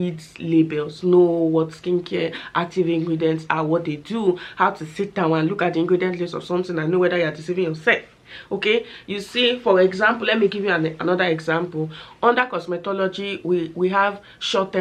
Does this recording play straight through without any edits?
yes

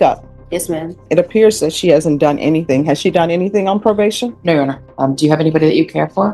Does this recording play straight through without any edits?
no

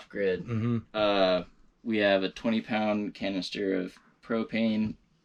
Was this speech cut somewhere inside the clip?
no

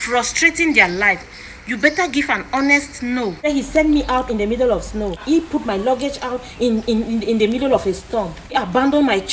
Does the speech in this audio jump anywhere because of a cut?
yes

